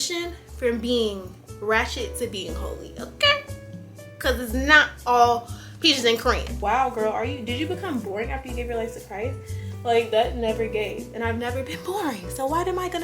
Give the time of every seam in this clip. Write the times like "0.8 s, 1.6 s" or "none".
6.5 s